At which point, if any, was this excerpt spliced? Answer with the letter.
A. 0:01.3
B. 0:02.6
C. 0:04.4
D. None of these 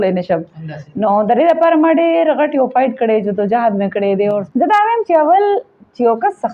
C